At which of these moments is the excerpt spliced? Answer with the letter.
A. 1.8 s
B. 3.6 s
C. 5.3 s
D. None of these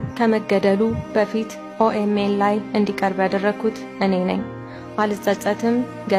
D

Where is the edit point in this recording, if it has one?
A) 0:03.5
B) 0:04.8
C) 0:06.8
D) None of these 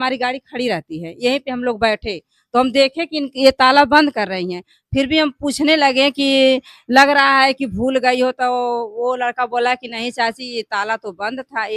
D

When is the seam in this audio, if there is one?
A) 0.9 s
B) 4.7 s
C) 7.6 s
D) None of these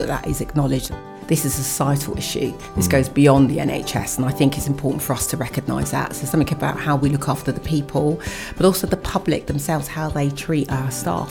A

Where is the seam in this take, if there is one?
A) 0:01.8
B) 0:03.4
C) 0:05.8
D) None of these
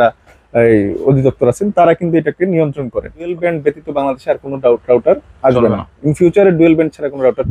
B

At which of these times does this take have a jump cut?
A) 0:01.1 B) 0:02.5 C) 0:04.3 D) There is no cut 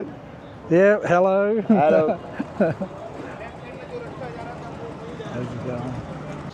D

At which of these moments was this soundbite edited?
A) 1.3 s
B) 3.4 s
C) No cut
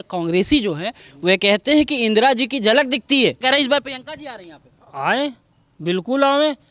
B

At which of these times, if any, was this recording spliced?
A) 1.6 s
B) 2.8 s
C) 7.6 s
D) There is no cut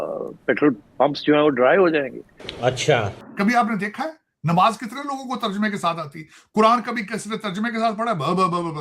B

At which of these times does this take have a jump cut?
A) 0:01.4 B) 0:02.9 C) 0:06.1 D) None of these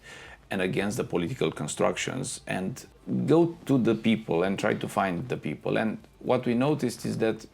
B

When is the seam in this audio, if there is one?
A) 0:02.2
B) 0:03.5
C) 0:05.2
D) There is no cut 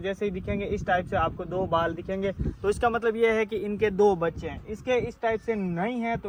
D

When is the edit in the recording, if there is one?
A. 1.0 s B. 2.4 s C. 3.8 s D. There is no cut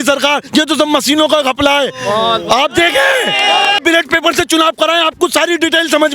C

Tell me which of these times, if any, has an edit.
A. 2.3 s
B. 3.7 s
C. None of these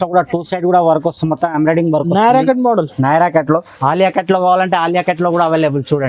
B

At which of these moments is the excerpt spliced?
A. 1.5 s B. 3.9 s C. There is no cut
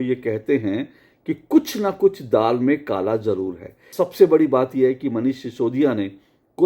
B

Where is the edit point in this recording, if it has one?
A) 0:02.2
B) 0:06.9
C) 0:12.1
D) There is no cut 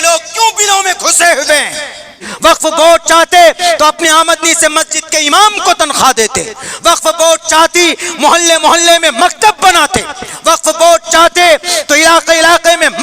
A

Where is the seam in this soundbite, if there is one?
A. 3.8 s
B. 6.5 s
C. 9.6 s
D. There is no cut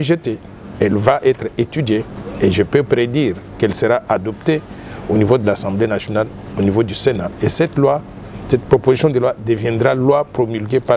D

